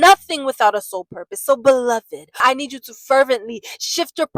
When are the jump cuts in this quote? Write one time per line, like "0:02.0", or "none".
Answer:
0:02.4